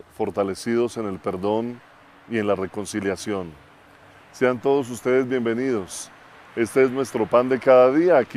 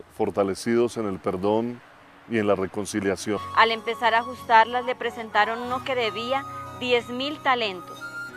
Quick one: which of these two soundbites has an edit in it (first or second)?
first